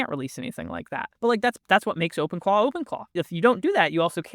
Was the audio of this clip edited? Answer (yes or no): yes